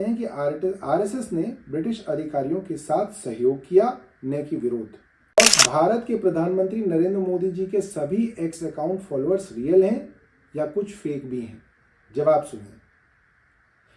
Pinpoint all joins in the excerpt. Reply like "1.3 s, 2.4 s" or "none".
5.4 s